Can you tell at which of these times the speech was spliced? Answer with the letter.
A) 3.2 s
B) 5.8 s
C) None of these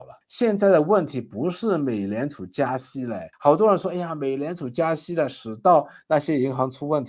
C